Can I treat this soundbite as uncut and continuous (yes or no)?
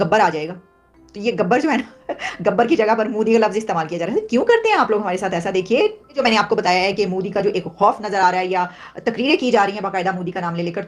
no